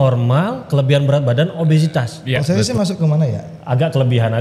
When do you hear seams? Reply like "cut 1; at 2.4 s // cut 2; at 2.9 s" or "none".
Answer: cut 1; at 2.4 s